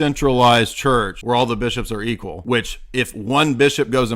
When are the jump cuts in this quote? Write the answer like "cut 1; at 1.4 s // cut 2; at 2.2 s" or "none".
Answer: cut 1; at 1.1 s // cut 2; at 2.3 s